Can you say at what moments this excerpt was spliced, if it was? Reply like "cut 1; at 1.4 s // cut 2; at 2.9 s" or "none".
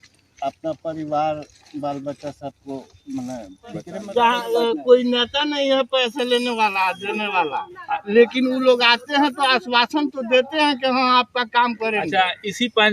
cut 1; at 3.9 s

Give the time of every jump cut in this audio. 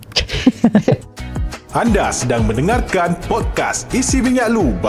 cut 1; at 1.0 s

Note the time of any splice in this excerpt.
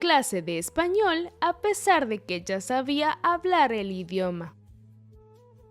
cut 1; at 4.8 s

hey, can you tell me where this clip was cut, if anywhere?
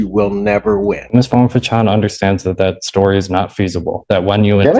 cut 1; at 1.0 s

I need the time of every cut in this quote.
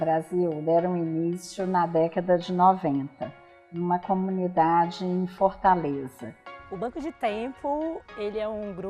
cut 1; at 6.1 s

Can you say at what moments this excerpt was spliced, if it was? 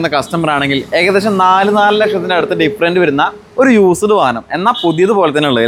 none

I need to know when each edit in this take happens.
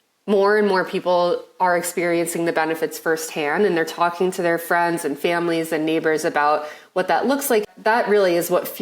cut 1; at 7.6 s

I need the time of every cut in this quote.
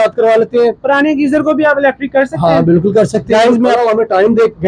cut 1; at 3.7 s

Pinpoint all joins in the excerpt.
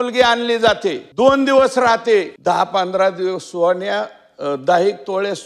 cut 1; at 1.0 s // cut 2; at 2.3 s

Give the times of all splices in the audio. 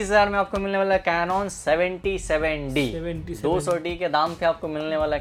none

